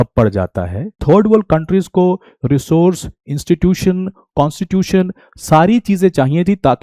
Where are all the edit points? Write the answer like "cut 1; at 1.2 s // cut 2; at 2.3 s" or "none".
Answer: cut 1; at 1.0 s